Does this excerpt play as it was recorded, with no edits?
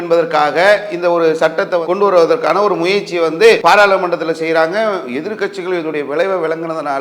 no; 1 cut; at 3.6 s

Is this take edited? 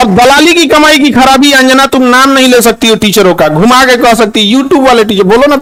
no; 0 cuts

